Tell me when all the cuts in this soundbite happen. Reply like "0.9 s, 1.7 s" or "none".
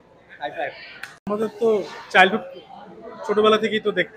1.3 s